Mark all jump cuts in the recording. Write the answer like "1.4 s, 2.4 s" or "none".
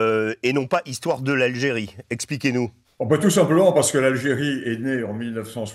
2.8 s

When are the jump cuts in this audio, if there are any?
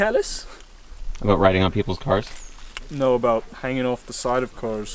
none

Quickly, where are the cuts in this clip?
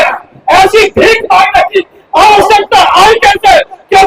none

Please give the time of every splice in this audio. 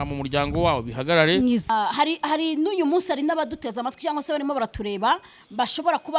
1.7 s

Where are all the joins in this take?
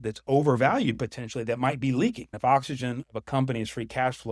2.3 s

